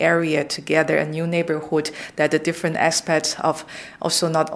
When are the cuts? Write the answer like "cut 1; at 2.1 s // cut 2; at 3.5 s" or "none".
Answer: none